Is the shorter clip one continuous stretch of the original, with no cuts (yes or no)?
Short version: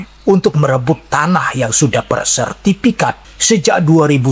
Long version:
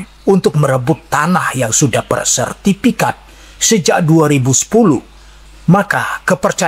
no